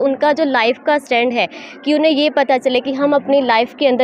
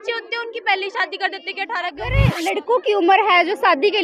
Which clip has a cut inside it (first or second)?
second